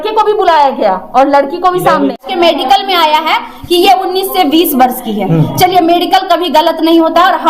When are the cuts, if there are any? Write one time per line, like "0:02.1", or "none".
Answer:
0:02.2